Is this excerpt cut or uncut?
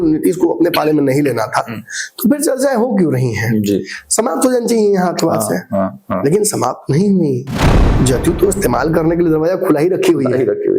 cut